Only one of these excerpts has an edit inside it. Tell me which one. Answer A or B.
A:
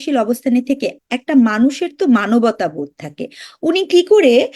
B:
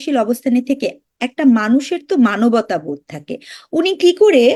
A